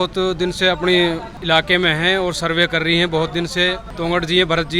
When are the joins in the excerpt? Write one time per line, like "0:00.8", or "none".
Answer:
0:01.3
0:03.9